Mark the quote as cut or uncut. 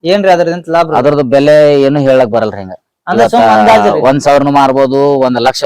uncut